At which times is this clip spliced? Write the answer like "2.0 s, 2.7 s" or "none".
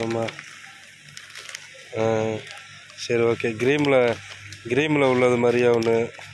none

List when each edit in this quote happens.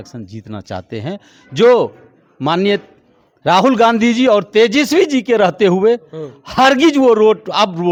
none

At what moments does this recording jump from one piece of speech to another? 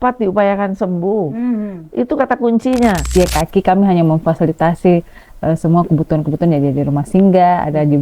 3.1 s

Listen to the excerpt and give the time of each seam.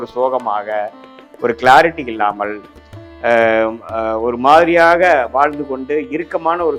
none

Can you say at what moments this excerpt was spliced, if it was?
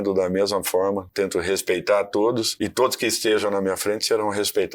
1.1 s, 2.5 s

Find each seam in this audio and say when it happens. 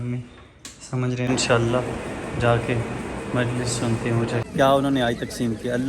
1.3 s, 4.5 s

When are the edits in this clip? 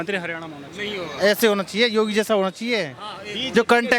none

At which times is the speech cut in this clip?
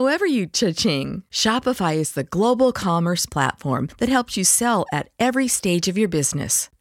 none

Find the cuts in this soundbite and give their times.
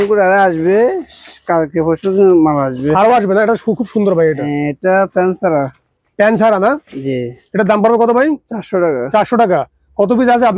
none

